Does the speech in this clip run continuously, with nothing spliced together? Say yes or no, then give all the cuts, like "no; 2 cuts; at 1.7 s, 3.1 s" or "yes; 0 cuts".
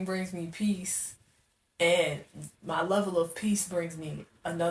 yes; 0 cuts